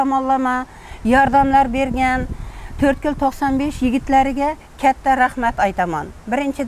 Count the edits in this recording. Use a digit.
0